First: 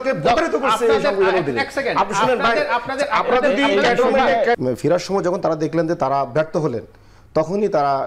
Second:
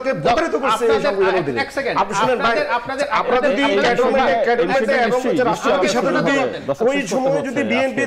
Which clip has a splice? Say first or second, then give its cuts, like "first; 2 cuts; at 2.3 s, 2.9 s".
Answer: first; 1 cut; at 4.6 s